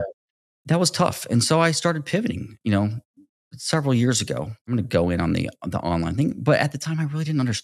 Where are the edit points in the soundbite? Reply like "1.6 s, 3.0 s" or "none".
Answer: 4.7 s